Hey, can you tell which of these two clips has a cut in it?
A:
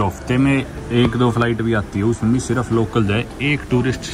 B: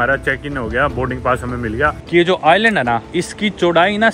B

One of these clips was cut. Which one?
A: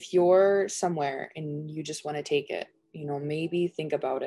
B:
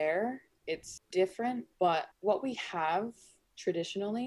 B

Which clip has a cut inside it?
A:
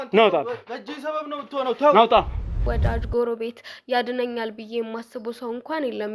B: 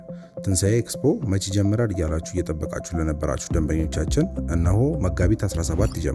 A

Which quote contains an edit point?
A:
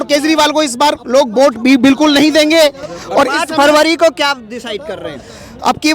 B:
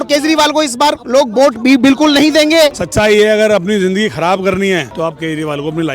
B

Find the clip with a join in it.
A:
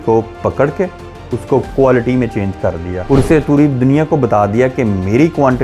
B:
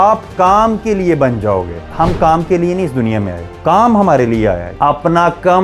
B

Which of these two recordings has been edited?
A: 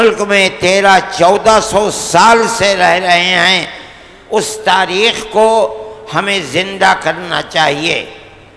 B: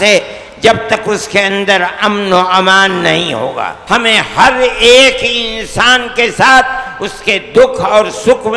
B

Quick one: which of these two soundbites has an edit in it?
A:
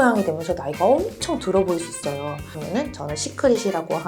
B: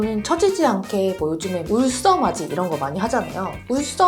A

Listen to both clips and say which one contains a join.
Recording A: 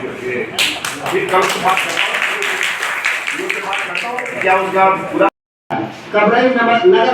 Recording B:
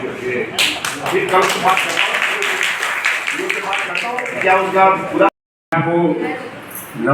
A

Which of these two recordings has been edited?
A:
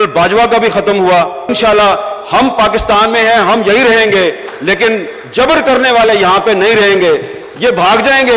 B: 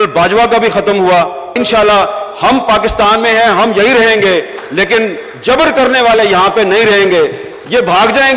A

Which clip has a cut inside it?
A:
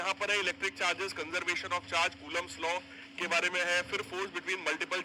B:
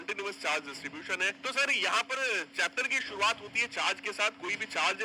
B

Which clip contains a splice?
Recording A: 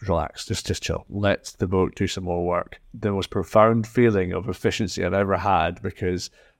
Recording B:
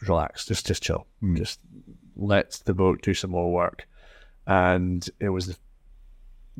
A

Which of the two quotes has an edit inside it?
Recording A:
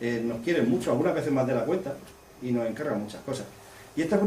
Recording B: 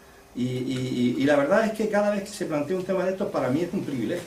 A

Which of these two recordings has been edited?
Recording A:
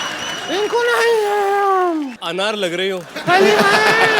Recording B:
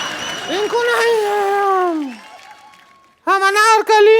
A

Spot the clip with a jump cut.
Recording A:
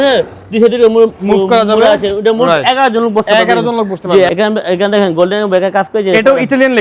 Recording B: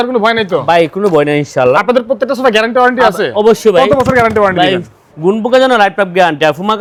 A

